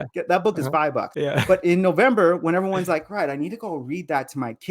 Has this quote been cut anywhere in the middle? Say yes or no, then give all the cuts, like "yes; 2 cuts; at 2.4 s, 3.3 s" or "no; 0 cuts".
yes; 1 cut; at 1.1 s